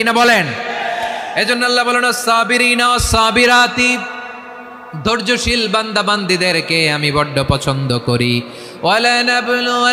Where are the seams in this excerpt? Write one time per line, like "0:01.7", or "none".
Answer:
none